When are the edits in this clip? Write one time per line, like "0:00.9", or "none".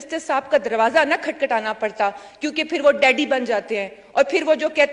none